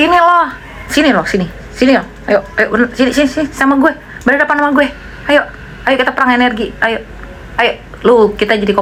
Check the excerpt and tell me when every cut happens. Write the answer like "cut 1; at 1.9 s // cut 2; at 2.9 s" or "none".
none